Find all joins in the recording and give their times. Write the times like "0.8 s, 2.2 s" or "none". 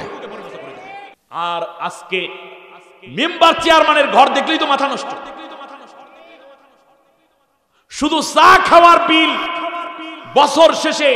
1.2 s